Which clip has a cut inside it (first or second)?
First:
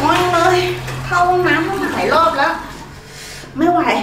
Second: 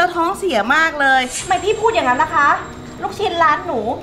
second